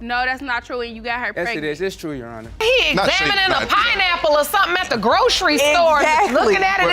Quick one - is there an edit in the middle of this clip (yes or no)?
yes